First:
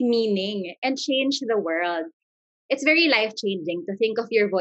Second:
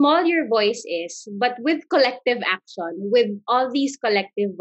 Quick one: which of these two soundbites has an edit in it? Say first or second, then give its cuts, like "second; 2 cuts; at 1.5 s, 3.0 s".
first; 1 cut; at 2.5 s